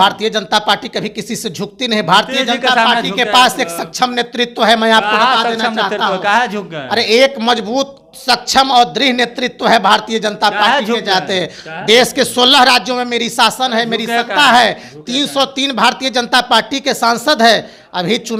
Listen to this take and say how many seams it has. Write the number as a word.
zero